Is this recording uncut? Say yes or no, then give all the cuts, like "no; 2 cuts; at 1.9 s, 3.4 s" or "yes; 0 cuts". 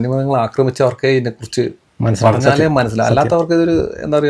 yes; 0 cuts